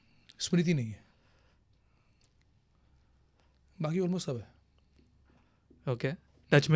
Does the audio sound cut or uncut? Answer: uncut